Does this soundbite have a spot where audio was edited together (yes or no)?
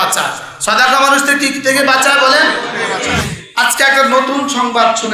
yes